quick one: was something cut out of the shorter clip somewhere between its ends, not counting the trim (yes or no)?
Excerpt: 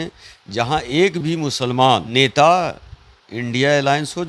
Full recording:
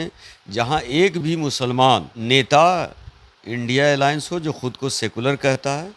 yes